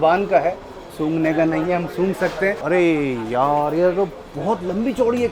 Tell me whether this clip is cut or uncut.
cut